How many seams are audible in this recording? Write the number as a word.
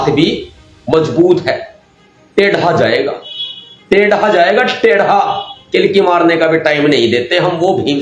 zero